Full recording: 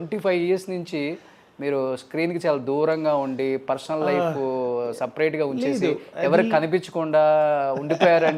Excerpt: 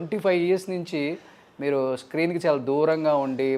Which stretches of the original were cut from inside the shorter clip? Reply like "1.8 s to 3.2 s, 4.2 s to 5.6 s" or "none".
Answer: none